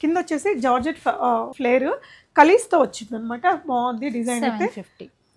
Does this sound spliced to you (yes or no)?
no